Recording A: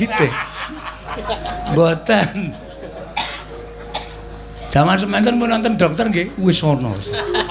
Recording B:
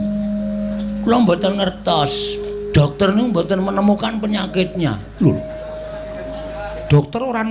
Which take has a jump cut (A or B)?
A